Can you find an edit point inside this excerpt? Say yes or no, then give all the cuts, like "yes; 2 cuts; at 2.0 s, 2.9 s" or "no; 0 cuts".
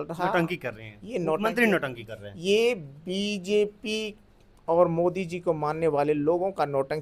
no; 0 cuts